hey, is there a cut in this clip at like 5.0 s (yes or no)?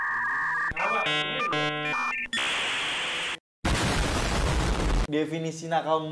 yes